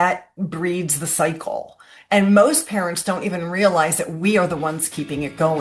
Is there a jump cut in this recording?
no; 0 cuts

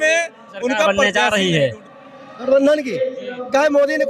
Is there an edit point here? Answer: yes; 1 cut; at 1.0 s

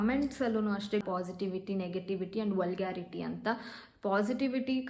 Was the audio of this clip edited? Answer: yes; 1 cut; at 1.0 s

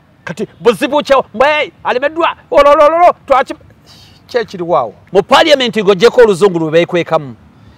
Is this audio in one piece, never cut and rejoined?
no; 1 cut; at 5.0 s

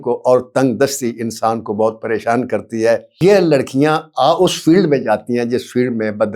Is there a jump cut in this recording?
yes; 1 cut; at 3.1 s

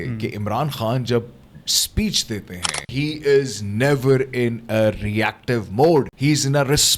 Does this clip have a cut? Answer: yes; 2 cuts; at 2.8 s, 6.1 s

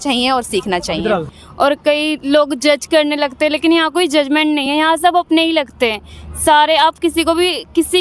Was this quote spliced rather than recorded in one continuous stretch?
yes; 1 cut; at 1.3 s

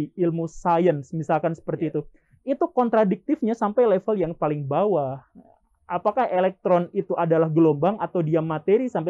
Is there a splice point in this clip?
no; 0 cuts

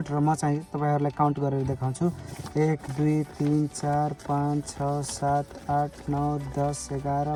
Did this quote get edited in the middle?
no; 0 cuts

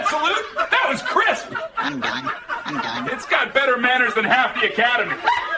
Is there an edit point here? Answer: no; 0 cuts

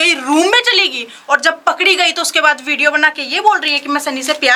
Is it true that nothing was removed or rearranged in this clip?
yes; 0 cuts

